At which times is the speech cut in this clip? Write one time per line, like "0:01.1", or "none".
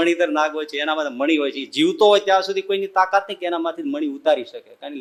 none